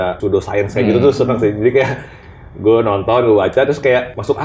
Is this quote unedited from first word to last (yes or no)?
yes